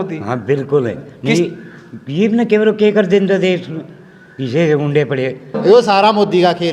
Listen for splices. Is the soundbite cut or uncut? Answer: cut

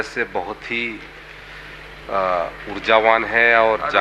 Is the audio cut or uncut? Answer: uncut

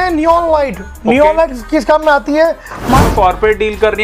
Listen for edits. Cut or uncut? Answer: cut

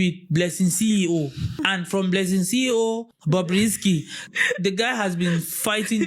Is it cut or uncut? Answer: cut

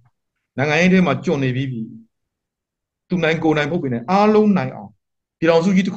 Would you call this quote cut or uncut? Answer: cut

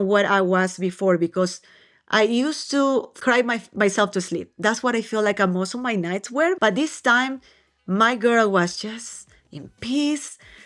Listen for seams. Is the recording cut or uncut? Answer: cut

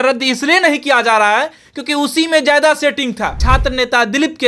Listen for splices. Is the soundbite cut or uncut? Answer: cut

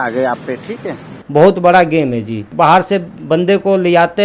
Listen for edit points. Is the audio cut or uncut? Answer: cut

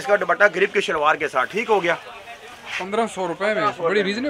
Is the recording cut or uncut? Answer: uncut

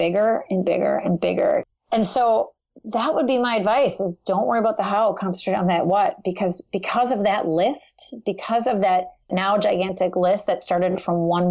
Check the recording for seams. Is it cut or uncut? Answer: cut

